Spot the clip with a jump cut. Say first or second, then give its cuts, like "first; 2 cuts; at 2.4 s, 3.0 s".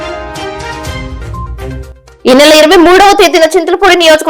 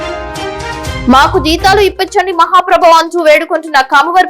second; 1 cut; at 1.0 s